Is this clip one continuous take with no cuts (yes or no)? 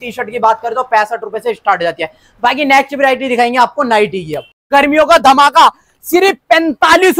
yes